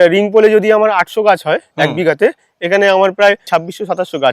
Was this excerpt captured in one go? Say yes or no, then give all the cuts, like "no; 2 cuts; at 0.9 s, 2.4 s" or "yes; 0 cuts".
no; 1 cut; at 3.4 s